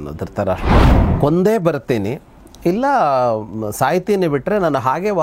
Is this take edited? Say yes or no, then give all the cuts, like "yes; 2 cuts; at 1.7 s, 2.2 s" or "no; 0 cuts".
yes; 1 cut; at 1.0 s